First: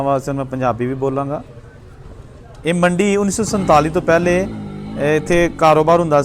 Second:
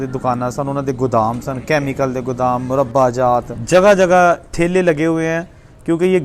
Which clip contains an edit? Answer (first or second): second